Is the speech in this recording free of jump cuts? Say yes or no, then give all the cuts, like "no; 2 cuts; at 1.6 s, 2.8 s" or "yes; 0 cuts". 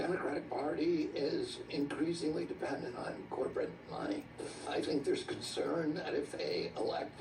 no; 1 cut; at 4.3 s